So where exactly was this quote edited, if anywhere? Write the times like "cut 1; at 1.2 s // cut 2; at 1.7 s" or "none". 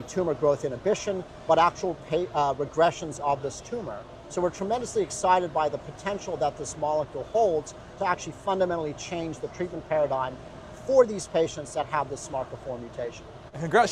none